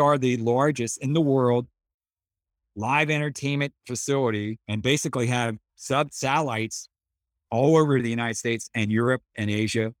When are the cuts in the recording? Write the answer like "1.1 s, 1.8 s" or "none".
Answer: 8.0 s